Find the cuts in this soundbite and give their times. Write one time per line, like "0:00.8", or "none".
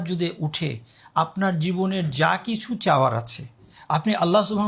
none